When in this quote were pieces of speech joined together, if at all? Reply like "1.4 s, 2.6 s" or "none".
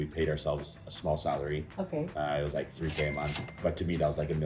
3.6 s